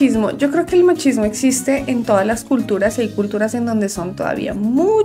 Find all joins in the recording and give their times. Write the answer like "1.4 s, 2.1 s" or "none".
none